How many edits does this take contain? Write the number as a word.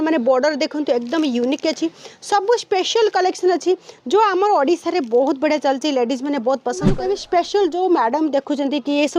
one